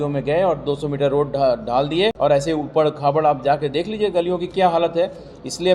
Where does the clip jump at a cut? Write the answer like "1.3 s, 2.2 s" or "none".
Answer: 2.2 s